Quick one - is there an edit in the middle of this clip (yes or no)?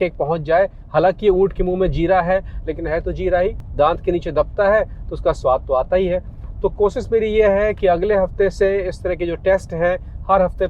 no